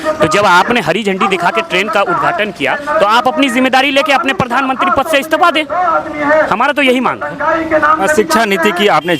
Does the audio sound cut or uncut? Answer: uncut